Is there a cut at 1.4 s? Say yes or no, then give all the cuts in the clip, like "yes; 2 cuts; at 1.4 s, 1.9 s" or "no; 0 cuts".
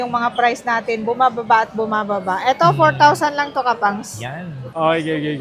no; 1 cut; at 4.2 s